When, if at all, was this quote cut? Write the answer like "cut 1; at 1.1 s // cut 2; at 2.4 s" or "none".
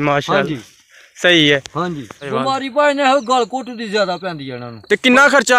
cut 1; at 2.3 s // cut 2; at 4.7 s